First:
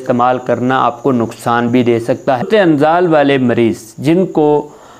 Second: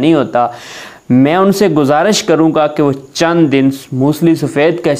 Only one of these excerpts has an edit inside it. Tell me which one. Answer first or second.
first